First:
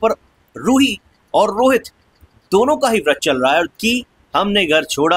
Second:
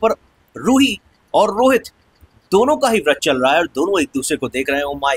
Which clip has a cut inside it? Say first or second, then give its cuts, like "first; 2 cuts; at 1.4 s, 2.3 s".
first; 1 cut; at 3.7 s